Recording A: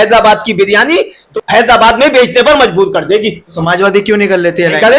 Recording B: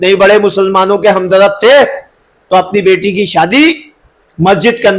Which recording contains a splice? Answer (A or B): A